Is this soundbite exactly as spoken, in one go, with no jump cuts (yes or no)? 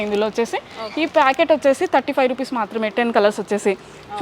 yes